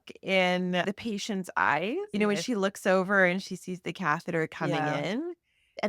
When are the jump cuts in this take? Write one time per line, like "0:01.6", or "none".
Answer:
0:02.1